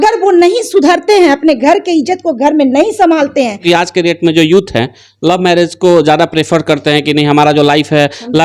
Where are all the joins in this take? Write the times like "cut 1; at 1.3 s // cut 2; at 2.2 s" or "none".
cut 1; at 3.6 s